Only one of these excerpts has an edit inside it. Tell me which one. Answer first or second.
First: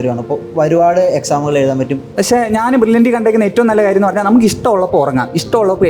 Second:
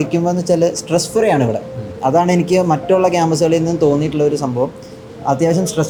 first